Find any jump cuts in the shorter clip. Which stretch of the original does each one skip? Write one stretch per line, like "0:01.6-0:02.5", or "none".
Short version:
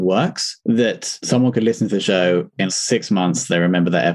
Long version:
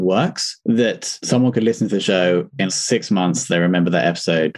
none

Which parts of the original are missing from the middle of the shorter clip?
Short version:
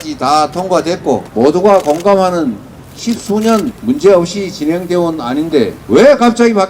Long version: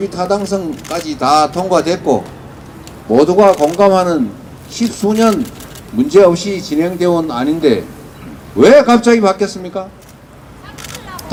0:02.3-0:03.0
0:05.5-0:05.9
0:07.9-0:08.5

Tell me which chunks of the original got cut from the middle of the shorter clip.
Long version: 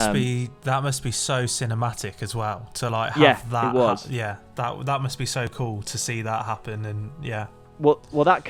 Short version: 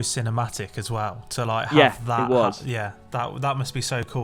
none

